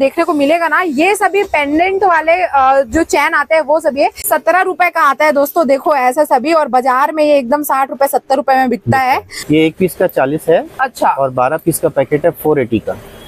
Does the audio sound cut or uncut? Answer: cut